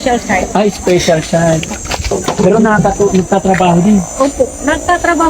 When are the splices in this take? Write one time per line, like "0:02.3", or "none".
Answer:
0:02.1